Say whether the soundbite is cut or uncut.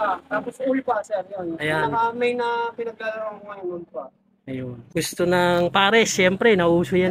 cut